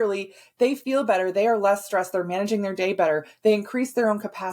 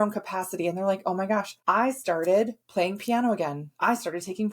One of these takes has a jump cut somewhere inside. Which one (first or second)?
second